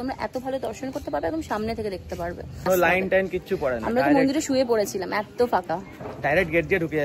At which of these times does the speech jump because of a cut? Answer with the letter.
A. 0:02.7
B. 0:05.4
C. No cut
A